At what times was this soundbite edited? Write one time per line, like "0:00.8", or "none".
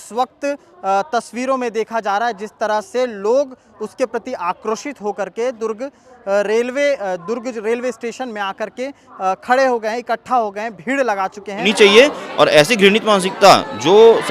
0:11.7